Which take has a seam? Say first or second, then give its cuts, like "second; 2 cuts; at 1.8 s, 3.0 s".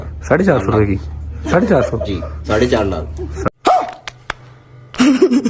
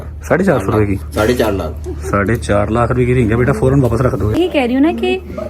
second; 3 cuts; at 1.0 s, 2.1 s, 4.3 s